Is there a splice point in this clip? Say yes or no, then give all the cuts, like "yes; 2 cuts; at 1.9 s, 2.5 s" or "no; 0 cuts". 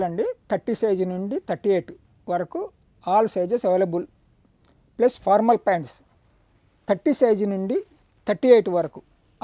no; 0 cuts